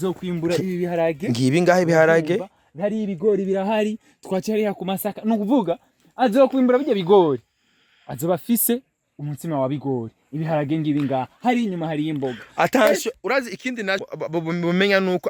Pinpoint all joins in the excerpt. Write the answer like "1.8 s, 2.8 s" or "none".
none